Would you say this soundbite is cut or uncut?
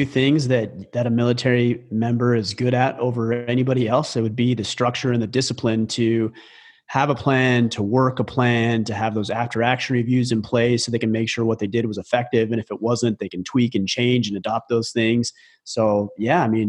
uncut